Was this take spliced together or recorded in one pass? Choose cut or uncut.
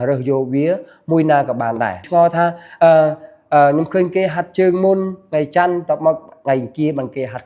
cut